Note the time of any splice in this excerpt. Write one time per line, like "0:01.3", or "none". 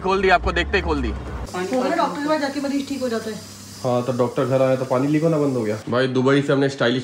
0:01.4
0:05.8